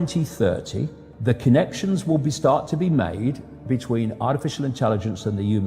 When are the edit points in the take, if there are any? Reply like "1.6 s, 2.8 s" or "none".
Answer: 1.2 s